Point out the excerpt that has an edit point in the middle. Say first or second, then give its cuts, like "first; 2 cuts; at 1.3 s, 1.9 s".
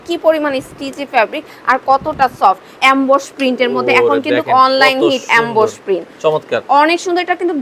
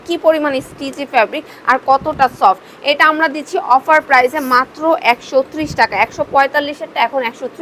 first; 1 cut; at 2.8 s